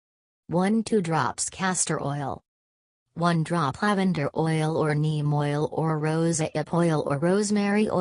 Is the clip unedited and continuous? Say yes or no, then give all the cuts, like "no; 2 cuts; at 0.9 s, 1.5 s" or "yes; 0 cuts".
no; 2 cuts; at 1.4 s, 5.4 s